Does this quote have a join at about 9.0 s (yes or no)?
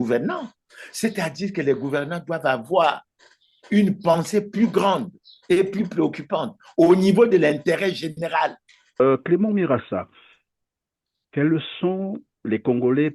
yes